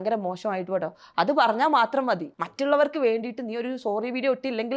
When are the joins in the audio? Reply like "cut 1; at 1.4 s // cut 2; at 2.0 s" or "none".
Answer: cut 1; at 2.5 s